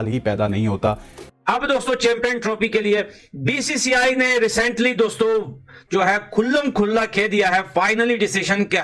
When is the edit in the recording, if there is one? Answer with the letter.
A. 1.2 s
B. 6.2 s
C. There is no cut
A